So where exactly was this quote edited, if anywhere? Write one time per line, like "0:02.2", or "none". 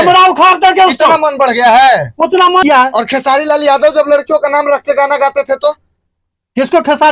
0:02.6